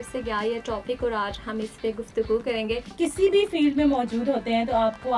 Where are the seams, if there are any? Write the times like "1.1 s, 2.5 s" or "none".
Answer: 2.9 s